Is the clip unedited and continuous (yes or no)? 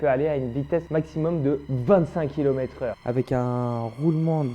no